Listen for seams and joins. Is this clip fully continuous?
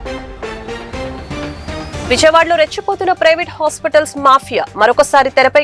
no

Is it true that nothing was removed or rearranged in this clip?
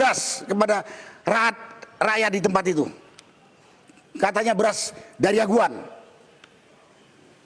yes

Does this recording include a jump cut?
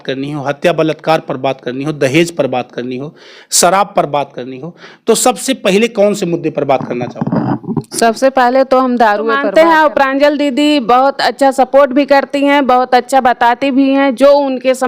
yes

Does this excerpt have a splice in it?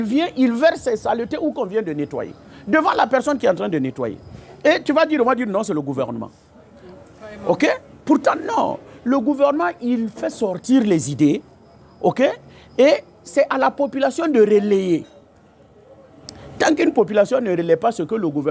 no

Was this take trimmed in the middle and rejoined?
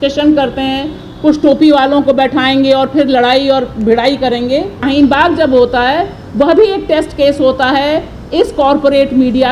yes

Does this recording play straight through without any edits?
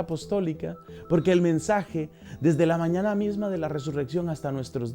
no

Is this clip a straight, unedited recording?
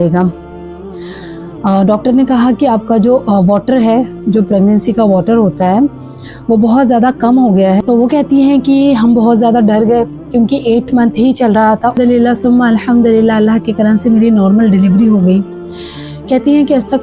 no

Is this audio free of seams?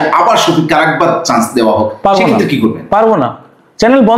yes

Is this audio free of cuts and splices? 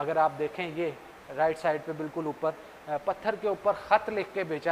yes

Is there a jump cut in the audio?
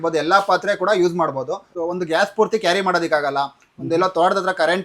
yes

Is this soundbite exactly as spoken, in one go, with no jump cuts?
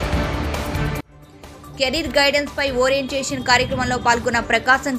no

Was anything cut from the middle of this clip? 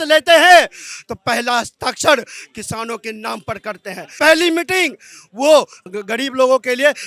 no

